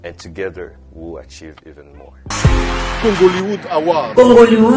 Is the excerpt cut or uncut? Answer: cut